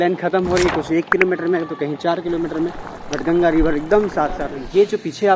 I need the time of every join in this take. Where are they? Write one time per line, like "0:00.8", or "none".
0:04.4